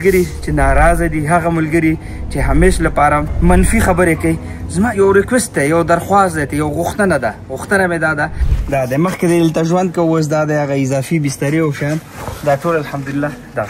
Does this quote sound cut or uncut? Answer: cut